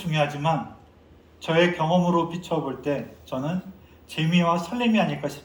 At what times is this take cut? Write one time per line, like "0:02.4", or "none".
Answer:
none